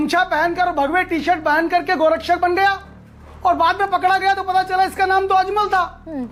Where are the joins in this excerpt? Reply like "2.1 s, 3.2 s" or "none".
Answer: none